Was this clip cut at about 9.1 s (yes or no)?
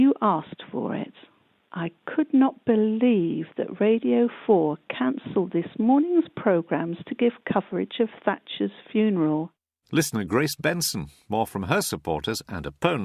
yes